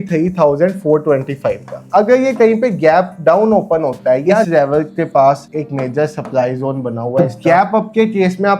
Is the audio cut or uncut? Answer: cut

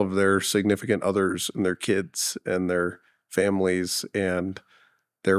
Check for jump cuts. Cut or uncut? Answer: uncut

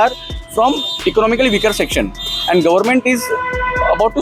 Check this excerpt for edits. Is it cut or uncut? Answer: uncut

